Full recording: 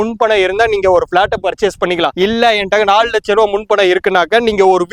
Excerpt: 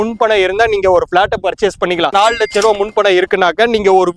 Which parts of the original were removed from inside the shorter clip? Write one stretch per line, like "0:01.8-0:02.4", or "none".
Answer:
0:02.1-0:02.9